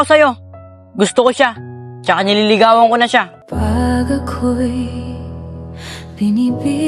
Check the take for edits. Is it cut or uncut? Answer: cut